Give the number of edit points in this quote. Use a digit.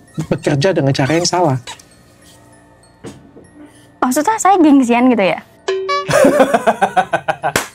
0